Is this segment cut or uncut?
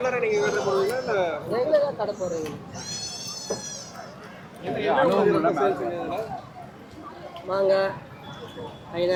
uncut